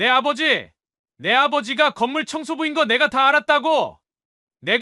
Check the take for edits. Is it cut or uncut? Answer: uncut